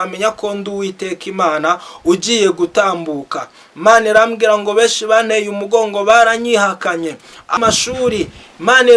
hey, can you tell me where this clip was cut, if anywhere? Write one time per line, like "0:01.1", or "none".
0:07.4